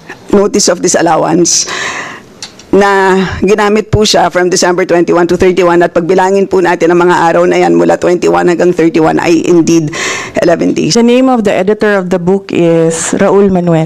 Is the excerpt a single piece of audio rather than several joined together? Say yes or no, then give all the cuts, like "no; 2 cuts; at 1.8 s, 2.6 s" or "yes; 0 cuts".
no; 1 cut; at 10.9 s